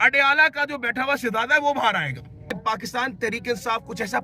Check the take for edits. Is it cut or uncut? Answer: cut